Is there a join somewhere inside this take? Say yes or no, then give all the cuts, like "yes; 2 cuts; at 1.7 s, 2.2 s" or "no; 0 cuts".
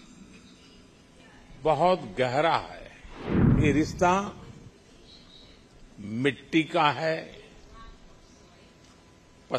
yes; 1 cut; at 3.5 s